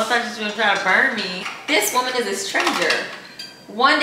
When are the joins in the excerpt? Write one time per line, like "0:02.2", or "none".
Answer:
0:01.3

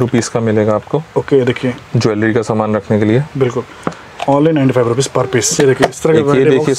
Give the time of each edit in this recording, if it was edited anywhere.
0:05.5

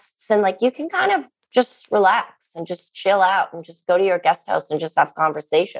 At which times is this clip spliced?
none

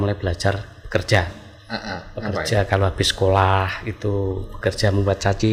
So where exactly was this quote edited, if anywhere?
none

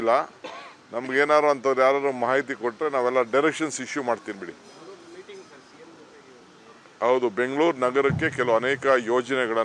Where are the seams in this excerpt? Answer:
none

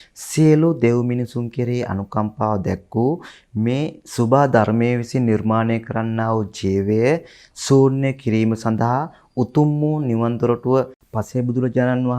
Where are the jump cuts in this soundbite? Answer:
0:11.0

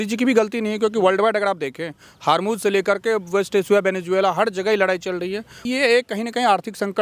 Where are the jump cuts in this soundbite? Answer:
0:05.6

